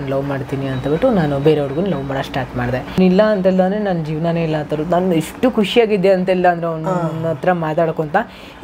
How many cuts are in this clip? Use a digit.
1